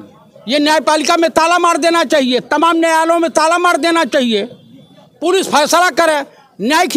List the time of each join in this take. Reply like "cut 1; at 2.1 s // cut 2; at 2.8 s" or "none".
none